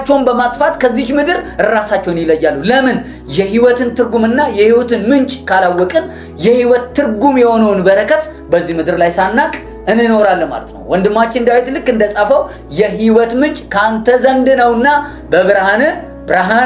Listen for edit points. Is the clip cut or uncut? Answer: uncut